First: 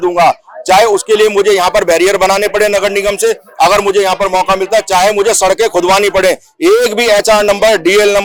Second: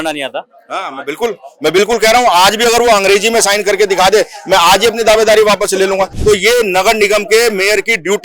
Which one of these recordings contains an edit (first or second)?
second